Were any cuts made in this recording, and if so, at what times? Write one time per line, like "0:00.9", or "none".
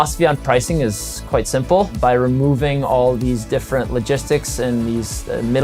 none